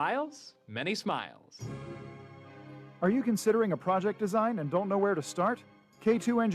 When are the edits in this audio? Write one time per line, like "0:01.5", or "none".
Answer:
0:01.4